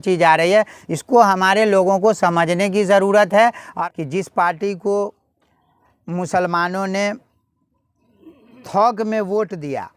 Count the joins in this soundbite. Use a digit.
1